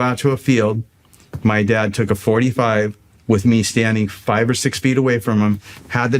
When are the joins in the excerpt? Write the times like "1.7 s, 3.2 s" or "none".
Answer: 3.1 s, 4.2 s